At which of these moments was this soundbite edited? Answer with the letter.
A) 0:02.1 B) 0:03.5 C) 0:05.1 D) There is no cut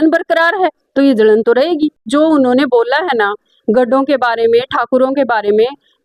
A